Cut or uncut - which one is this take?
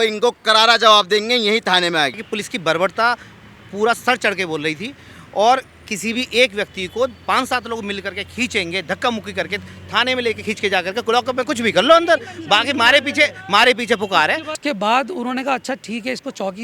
cut